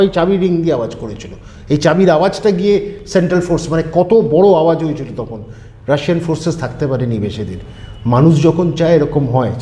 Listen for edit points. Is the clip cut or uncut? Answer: uncut